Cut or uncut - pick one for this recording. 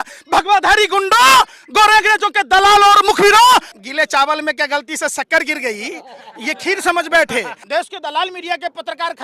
cut